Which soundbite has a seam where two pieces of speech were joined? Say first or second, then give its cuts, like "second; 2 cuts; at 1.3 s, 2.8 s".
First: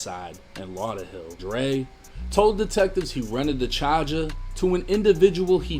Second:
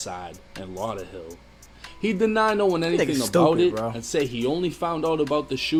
first; 1 cut; at 1.4 s